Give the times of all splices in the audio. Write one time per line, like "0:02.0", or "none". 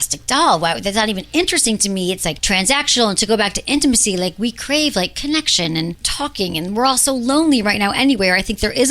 0:02.4
0:06.0